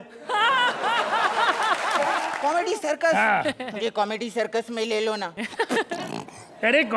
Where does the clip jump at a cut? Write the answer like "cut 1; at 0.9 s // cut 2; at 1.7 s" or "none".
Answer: cut 1; at 2.3 s